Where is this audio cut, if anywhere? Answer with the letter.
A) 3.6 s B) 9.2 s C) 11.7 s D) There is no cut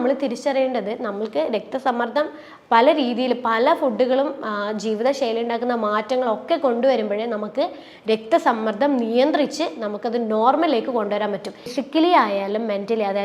C